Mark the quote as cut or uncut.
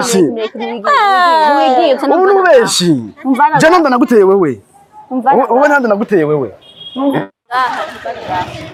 uncut